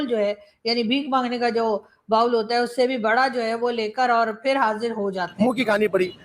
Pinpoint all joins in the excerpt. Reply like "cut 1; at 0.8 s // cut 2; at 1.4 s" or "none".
cut 1; at 5.3 s